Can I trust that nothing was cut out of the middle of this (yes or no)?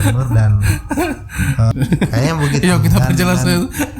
no